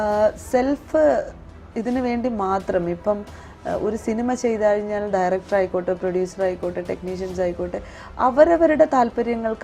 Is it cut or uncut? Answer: uncut